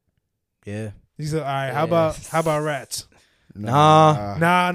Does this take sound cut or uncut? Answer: uncut